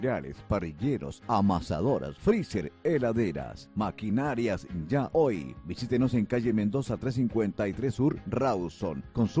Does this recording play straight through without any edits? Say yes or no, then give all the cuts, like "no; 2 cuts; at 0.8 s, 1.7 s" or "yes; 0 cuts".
yes; 0 cuts